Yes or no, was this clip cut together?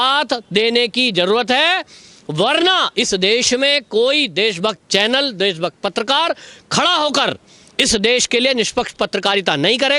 no